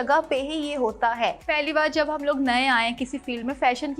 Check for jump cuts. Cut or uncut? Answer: cut